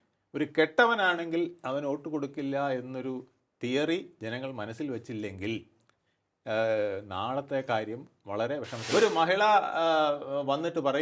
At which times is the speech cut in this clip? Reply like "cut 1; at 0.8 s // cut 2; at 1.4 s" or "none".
cut 1; at 8.9 s